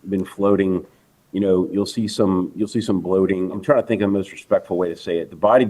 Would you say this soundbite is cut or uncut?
cut